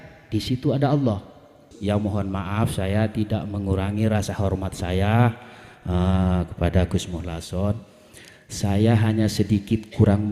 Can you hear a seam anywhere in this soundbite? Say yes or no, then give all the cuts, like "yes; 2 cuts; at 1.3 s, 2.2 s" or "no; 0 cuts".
yes; 1 cut; at 1.7 s